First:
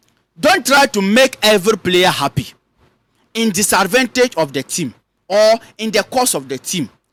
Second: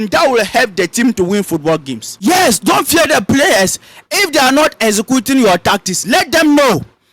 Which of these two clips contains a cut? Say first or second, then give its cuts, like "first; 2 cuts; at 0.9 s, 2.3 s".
second; 1 cut; at 2.1 s